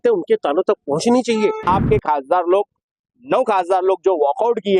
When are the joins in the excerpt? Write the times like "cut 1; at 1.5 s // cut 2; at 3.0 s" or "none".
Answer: cut 1; at 1.6 s